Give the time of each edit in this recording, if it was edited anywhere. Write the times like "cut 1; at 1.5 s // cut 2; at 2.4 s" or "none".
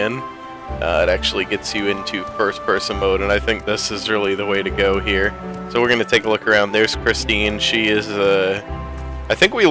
none